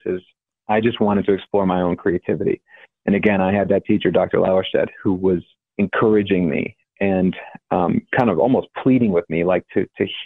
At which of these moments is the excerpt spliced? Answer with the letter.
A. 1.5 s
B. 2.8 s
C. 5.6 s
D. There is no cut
C